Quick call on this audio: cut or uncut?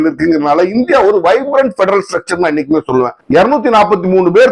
cut